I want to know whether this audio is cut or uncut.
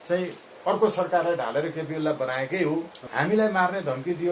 cut